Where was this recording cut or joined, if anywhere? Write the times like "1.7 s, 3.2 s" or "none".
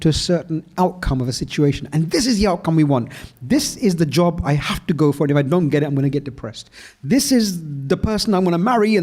none